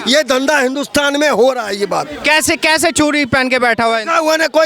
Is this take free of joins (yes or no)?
yes